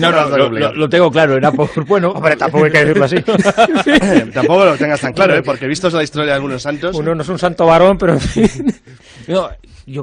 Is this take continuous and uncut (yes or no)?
no